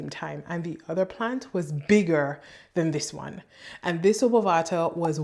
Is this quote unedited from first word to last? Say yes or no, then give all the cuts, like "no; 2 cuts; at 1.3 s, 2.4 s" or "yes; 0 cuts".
yes; 0 cuts